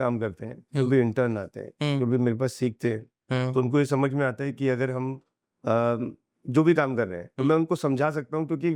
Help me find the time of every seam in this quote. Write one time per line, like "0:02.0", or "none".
none

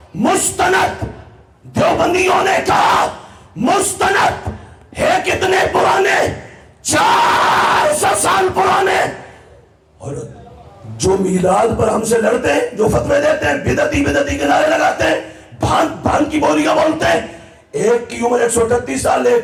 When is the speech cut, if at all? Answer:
none

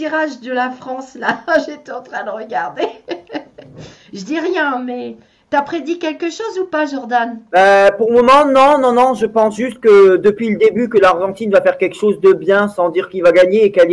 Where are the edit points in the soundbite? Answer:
0:09.3

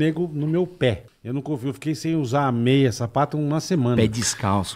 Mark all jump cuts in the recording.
0:01.1

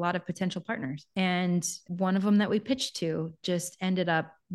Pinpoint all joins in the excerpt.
0:01.0
0:01.8

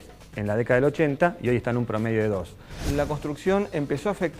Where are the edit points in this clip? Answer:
0:02.8

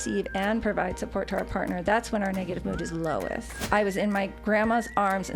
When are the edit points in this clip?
0:03.5

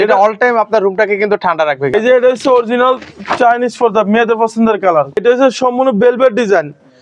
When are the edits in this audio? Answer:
0:01.9
0:05.2

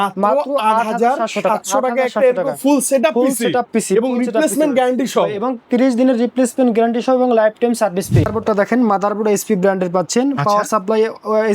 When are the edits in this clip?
0:08.3

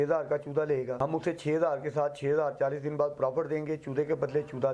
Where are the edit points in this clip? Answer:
0:00.9

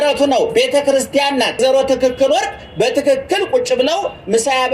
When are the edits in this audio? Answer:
0:01.6

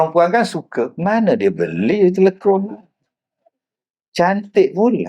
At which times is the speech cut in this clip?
0:00.9

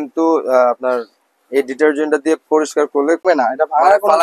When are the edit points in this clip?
0:03.2

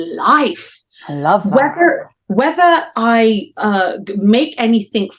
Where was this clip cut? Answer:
none

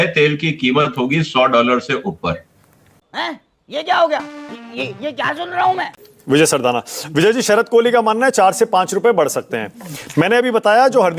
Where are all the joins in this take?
none

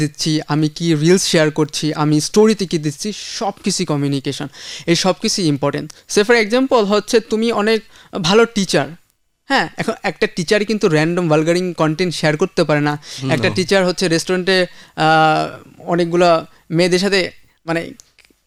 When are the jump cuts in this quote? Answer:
none

